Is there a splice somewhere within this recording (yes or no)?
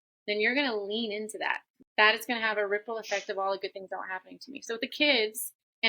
yes